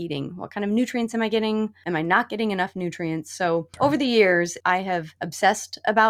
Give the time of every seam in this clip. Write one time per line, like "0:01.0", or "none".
0:01.8
0:03.7
0:04.7